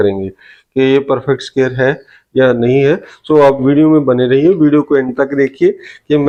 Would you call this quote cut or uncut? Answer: uncut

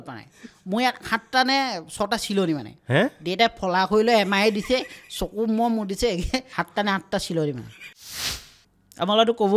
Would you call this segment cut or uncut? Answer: cut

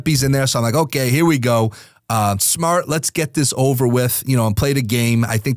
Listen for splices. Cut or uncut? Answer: uncut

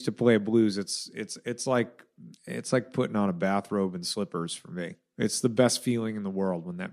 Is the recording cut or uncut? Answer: uncut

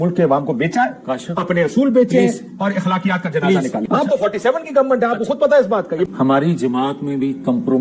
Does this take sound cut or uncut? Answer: cut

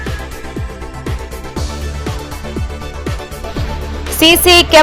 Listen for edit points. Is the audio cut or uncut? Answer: cut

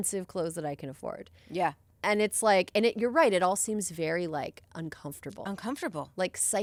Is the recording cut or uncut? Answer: uncut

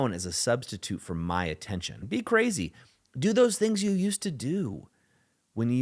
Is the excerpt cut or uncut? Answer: cut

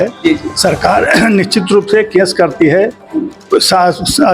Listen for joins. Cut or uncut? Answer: uncut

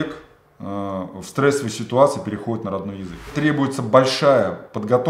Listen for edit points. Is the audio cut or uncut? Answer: cut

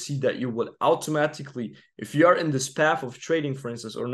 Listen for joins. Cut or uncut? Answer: uncut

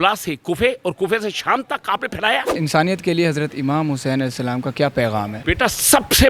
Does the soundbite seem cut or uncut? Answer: cut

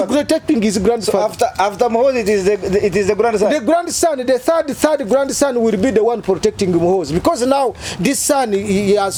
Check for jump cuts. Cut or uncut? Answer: uncut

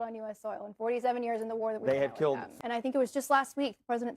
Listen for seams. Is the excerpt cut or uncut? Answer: cut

